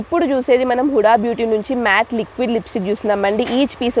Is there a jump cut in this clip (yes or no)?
no